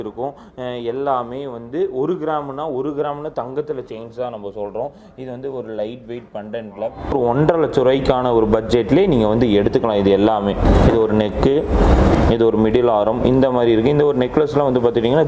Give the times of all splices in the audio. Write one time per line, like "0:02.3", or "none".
0:07.1
0:10.6